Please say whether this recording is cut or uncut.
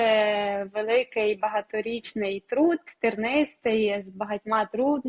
uncut